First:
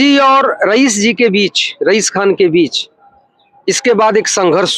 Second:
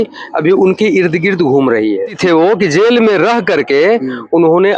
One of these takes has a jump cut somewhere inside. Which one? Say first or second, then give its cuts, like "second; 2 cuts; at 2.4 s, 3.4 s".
second; 1 cut; at 2.1 s